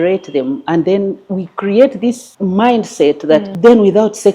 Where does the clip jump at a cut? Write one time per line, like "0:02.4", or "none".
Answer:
0:02.3
0:03.5